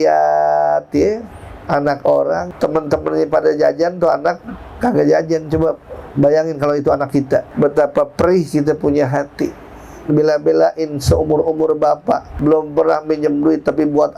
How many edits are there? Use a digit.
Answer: 3